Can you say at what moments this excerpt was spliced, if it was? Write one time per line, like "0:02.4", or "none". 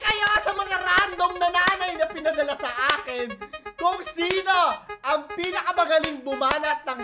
none